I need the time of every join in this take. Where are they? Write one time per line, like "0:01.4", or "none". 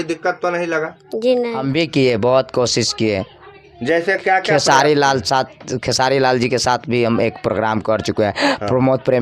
0:01.6